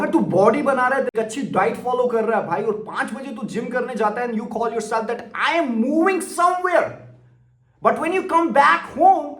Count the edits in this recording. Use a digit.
1